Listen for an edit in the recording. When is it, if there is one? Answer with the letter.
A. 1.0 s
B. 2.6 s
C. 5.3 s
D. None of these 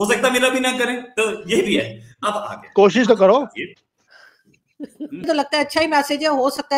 C